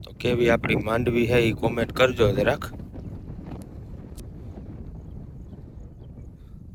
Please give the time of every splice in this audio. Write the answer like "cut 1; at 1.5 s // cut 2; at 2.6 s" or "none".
none